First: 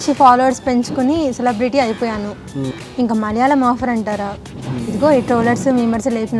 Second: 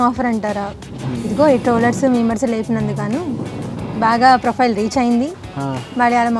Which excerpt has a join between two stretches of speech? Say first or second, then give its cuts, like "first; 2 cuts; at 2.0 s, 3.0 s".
first; 1 cut; at 2.6 s